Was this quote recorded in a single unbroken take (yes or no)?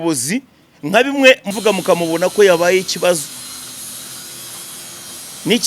no